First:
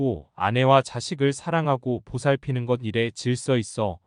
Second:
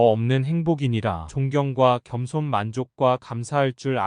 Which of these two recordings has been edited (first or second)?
second